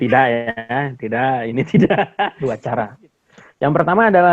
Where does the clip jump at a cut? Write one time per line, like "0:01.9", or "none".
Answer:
0:02.3